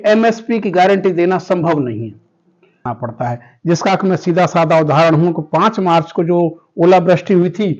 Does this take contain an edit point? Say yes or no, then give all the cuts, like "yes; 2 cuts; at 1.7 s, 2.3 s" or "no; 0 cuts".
yes; 1 cut; at 2.9 s